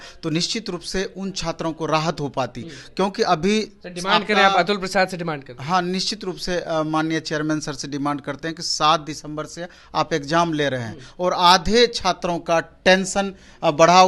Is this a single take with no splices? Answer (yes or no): yes